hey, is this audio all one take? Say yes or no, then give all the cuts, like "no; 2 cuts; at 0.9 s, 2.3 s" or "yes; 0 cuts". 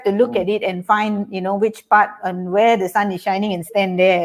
yes; 0 cuts